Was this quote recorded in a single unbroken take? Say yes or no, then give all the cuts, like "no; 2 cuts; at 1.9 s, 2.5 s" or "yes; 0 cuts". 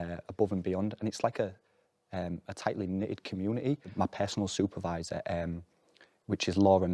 no; 1 cut; at 3.9 s